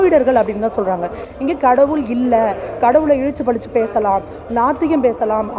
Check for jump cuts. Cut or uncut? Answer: uncut